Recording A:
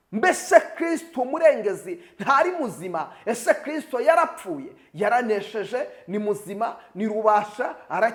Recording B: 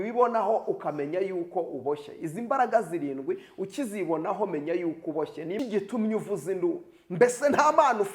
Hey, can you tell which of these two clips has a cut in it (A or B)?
B